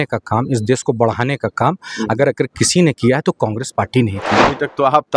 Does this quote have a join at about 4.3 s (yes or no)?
yes